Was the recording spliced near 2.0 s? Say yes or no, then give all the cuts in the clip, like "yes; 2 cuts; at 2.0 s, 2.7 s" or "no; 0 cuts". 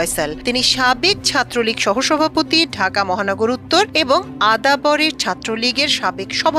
no; 0 cuts